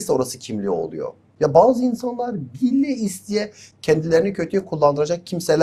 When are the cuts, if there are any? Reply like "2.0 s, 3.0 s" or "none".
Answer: 1.2 s